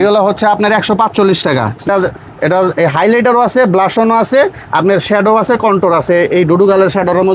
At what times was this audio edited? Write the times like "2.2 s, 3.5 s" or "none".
1.9 s

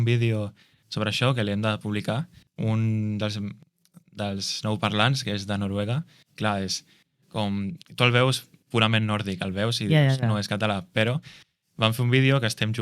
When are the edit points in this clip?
2.4 s

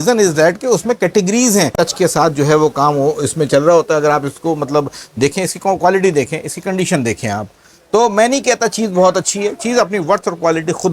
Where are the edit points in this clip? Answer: 1.7 s

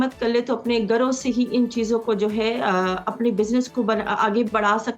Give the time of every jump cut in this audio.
none

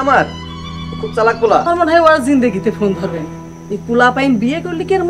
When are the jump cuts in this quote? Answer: 1.6 s

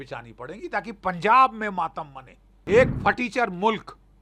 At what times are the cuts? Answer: 2.5 s

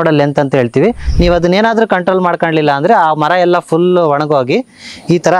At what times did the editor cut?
1.1 s

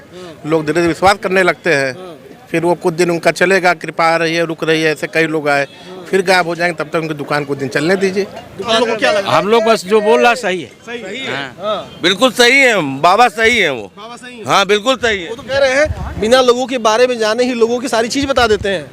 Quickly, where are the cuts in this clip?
8.8 s, 15.3 s

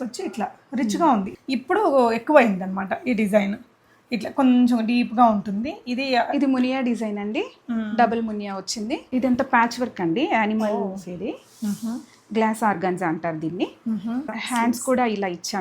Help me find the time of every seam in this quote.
1.3 s, 9.0 s, 14.4 s

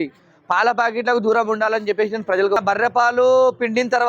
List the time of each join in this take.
2.6 s

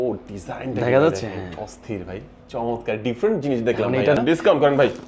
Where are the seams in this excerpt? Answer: 4.2 s

